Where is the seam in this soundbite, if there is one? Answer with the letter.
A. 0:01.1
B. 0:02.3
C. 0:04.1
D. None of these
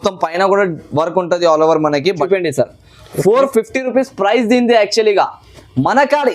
B